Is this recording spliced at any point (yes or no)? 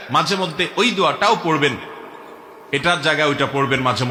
no